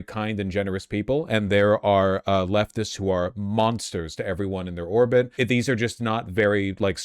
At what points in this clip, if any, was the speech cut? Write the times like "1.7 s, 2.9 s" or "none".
5.3 s

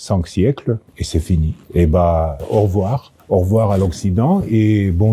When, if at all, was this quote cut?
1.3 s, 2.7 s

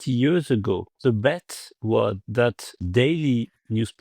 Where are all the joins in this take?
0.9 s, 2.2 s

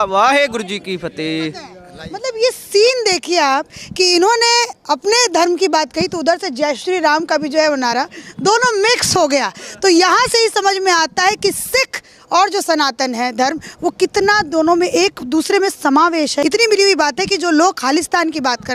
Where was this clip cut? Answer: 16.4 s

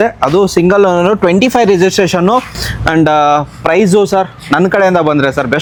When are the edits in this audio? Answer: none

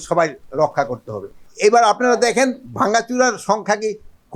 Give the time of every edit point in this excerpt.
1.4 s

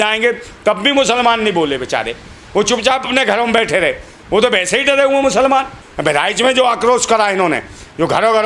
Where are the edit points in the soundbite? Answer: 5.8 s

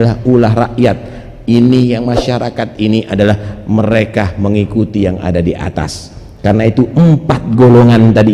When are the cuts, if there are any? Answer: none

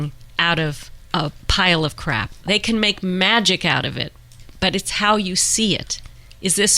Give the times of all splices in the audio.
0.9 s, 2.4 s

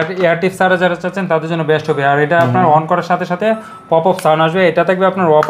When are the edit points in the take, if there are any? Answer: none

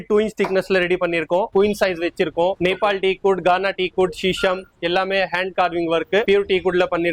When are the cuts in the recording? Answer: 1.5 s, 2.6 s, 6.2 s

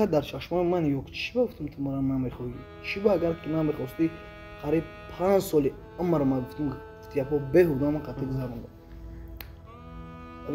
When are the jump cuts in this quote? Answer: none

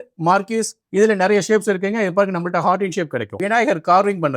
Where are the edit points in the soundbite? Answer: 3.3 s

